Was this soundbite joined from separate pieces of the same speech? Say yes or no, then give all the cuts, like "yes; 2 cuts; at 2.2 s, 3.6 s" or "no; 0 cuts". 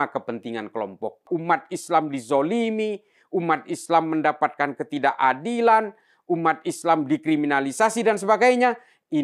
yes; 1 cut; at 1.3 s